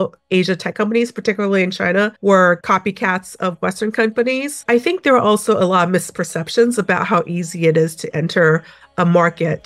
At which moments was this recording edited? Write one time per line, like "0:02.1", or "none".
0:02.1
0:02.6
0:04.5

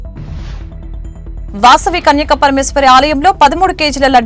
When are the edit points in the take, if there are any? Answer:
0:01.1

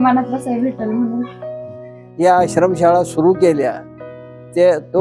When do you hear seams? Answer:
0:01.6

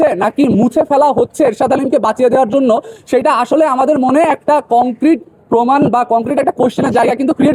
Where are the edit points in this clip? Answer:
none

